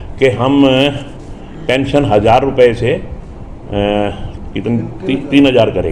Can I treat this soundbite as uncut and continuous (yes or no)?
yes